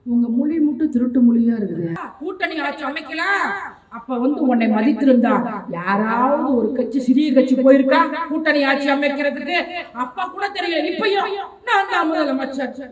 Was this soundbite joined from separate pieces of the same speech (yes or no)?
yes